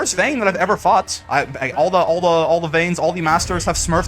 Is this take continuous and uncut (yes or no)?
yes